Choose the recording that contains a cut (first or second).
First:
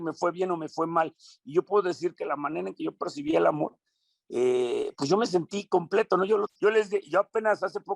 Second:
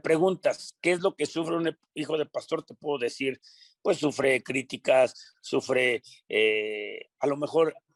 first